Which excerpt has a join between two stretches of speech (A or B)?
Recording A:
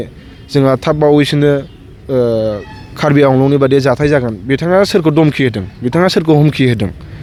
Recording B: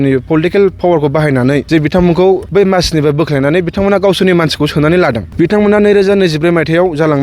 B